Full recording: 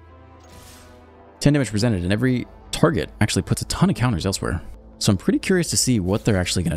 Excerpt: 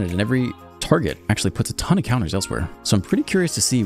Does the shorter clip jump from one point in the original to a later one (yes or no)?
yes